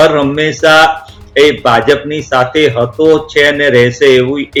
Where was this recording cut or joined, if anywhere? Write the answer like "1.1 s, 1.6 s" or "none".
none